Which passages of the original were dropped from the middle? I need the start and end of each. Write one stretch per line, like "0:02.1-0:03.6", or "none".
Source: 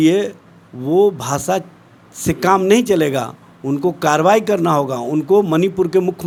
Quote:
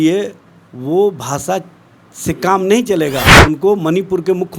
0:03.3-0:05.0